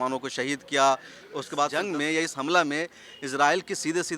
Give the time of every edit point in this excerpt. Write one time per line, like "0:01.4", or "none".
0:01.7